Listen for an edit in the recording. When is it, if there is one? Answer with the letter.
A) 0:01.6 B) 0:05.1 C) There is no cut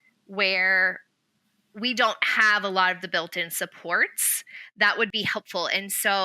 B